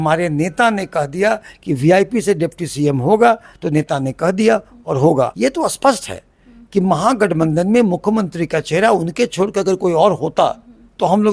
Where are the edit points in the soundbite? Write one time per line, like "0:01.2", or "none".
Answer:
0:05.3